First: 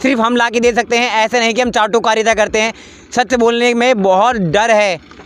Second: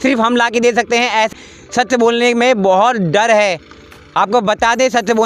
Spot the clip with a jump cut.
second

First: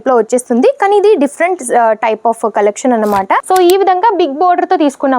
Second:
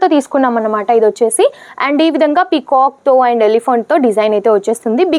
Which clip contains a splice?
first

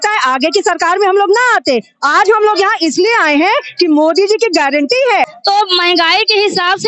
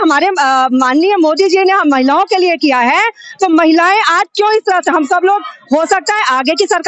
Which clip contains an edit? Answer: first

